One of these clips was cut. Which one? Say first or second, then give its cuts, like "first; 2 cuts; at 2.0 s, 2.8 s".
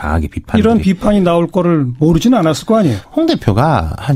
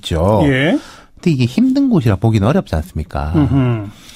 second; 1 cut; at 1.3 s